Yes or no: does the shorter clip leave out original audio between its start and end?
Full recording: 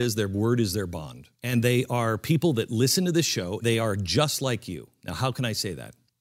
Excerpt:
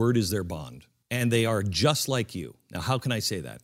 yes